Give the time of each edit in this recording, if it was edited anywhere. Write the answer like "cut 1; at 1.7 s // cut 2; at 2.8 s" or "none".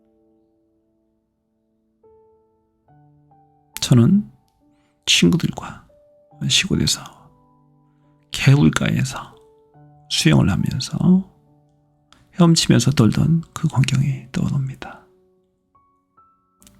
none